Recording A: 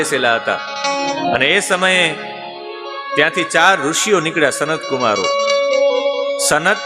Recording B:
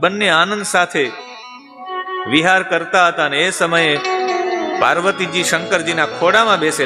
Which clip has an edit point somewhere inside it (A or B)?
A